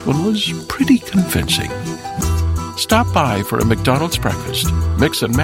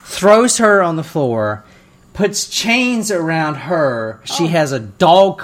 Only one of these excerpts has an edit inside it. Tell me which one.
second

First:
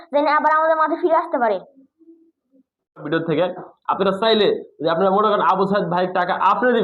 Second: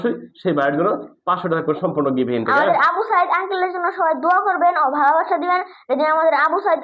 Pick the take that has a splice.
first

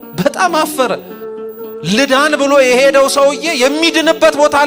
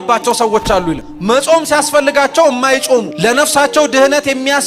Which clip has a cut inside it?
second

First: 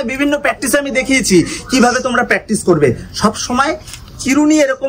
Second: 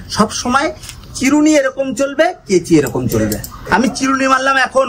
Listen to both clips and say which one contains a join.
second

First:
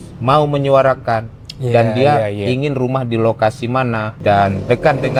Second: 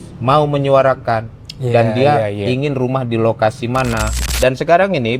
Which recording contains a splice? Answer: second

